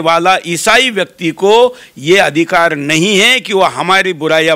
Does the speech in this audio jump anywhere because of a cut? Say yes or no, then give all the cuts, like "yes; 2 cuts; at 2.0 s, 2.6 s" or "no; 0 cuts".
no; 0 cuts